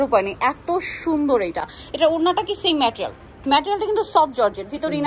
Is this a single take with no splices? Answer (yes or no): yes